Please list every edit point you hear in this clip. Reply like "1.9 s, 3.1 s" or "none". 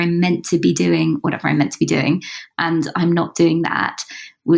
none